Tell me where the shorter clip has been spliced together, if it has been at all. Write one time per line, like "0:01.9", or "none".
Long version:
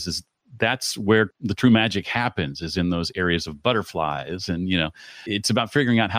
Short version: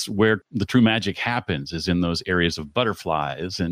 none